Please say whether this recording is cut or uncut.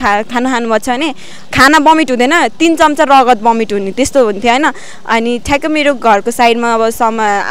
uncut